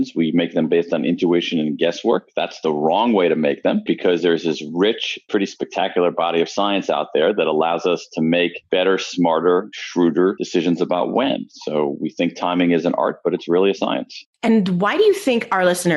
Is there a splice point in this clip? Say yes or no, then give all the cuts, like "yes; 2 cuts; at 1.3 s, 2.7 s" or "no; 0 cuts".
no; 0 cuts